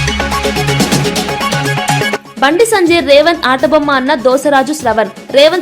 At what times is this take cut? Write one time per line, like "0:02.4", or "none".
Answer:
0:02.2